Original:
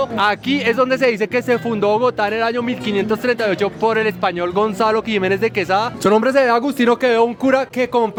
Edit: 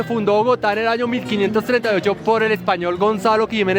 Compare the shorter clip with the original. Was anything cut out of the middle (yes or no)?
no